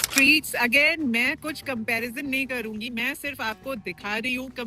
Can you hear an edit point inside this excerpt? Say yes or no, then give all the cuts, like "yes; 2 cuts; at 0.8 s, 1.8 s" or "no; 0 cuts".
no; 0 cuts